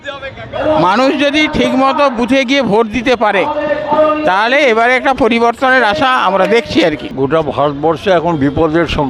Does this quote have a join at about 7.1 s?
yes; 1 cut; at 7.1 s

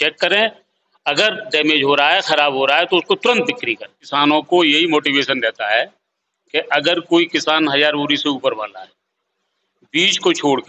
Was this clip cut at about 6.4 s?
no; 1 cut; at 4.0 s

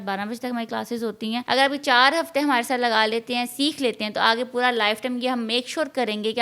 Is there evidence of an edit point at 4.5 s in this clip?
no; 1 cut; at 1.4 s

